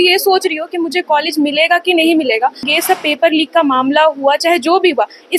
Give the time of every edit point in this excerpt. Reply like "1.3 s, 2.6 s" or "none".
2.7 s